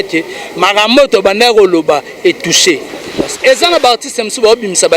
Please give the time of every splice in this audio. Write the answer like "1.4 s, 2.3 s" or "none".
3.4 s